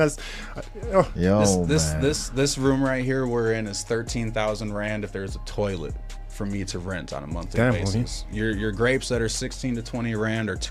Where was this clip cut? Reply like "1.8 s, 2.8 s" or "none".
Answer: none